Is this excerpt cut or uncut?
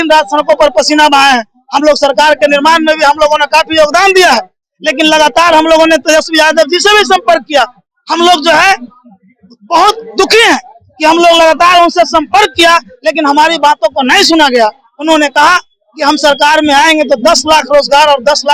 uncut